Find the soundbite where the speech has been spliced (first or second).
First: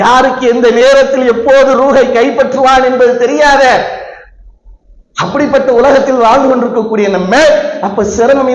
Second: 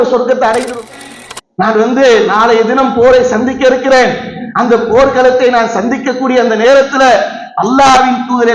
second